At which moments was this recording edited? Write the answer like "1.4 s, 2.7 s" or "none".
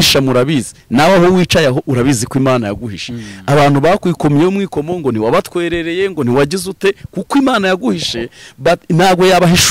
none